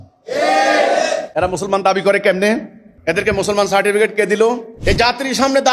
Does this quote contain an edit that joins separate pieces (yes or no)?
yes